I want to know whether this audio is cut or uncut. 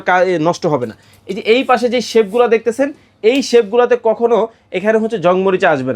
uncut